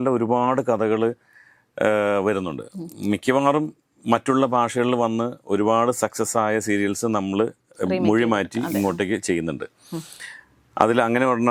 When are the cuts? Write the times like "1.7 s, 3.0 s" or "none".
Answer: none